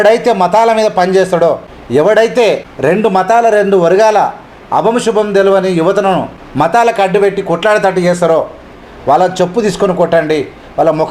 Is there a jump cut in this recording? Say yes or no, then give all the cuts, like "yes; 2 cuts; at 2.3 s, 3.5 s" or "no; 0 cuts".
yes; 3 cuts; at 1.7 s, 2.7 s, 6.4 s